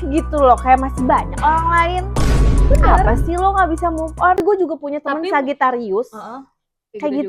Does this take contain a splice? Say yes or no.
yes